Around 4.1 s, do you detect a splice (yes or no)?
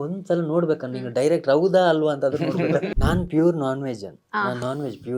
no